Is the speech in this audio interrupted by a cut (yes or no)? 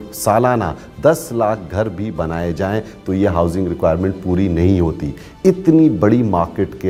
no